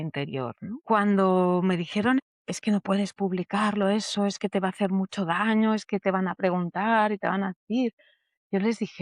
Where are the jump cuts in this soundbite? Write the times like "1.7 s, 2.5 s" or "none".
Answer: 0.8 s, 2.2 s

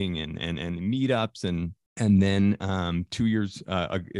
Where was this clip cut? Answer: 1.8 s

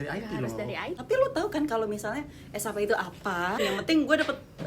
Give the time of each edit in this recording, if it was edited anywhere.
1.0 s, 3.6 s

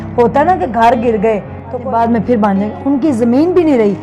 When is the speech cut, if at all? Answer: 1.8 s

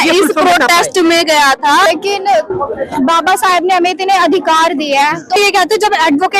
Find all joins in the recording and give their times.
1.9 s, 5.4 s

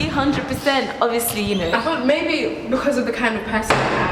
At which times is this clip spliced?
2.5 s

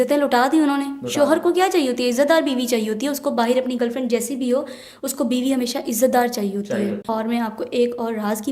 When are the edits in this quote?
7.1 s

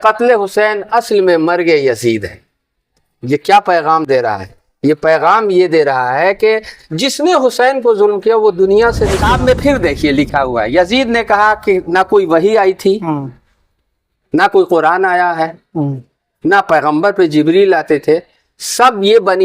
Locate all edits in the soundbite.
9.2 s

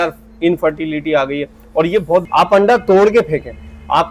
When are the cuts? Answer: 2.2 s

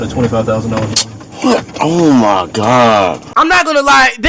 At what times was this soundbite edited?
3.2 s

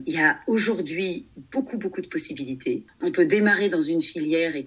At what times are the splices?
2.9 s

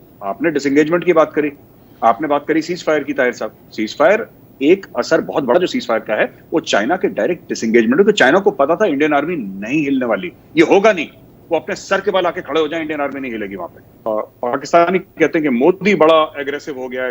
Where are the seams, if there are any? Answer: 14.0 s

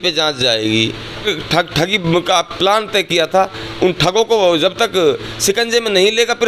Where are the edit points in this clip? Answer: 1.2 s

